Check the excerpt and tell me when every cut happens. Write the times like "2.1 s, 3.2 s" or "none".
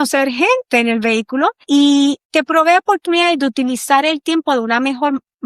1.8 s